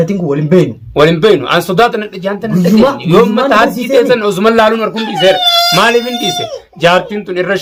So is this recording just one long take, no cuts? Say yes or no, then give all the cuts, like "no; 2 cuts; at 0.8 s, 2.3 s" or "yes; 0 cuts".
yes; 0 cuts